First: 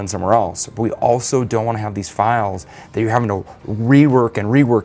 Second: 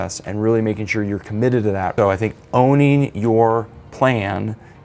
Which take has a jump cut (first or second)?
second